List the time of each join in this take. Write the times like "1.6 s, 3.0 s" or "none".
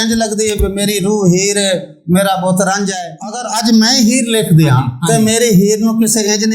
2.9 s, 4.9 s